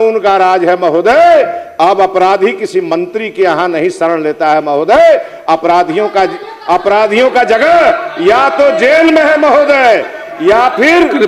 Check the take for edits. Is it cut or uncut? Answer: uncut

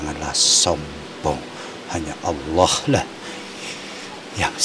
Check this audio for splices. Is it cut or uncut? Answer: uncut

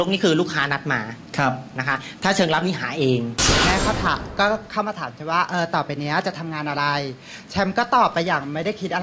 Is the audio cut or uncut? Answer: cut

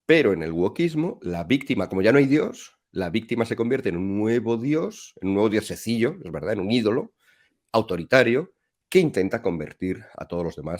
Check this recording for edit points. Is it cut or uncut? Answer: uncut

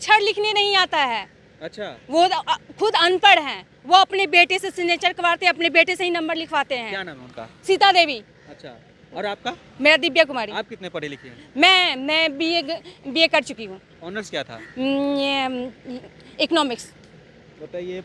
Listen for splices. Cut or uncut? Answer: uncut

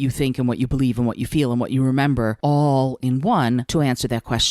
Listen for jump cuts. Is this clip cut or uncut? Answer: cut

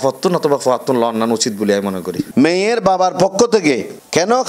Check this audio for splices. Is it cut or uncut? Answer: cut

